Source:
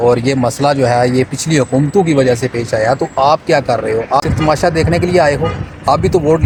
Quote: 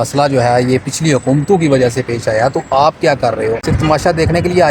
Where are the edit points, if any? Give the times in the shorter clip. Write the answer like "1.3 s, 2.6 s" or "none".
3.6 s